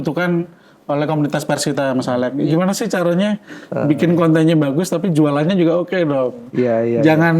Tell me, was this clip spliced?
yes; 1 cut; at 2.4 s

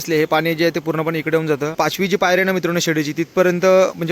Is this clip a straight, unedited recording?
no; 1 cut; at 1.7 s

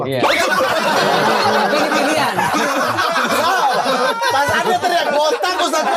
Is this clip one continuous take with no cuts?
yes; 0 cuts

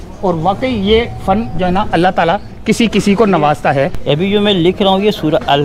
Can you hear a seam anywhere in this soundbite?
yes; 1 cut; at 4.0 s

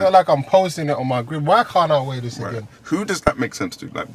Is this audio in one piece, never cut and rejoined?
no; 1 cut; at 2.7 s

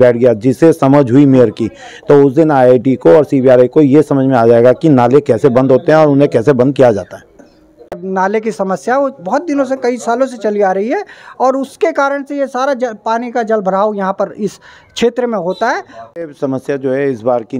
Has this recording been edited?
yes; 2 cuts; at 7.9 s, 16.1 s

